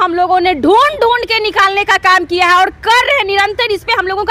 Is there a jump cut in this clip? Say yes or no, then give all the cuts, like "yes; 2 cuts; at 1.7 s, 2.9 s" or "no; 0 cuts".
no; 0 cuts